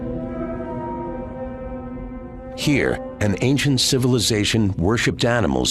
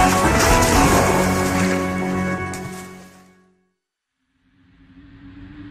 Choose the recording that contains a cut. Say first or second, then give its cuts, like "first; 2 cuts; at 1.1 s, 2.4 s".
first; 1 cut; at 2.0 s